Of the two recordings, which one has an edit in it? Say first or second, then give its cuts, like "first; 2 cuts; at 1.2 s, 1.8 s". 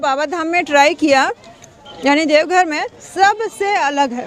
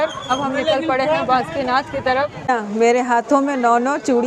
second; 1 cut; at 2.5 s